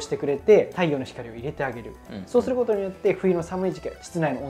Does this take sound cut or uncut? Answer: uncut